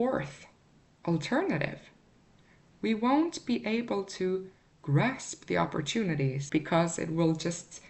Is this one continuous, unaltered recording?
no; 1 cut; at 6.4 s

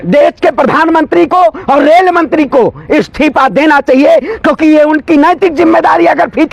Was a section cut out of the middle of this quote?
no; 0 cuts

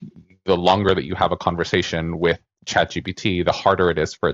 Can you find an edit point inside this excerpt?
no; 0 cuts

